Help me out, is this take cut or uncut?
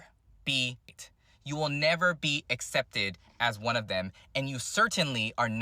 cut